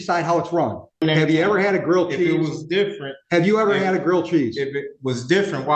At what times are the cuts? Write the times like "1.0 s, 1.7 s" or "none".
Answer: 1.0 s